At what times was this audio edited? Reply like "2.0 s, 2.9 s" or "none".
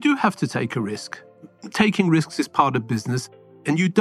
1.5 s, 3.2 s